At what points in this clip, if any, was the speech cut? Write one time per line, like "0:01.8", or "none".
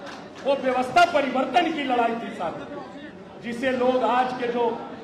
none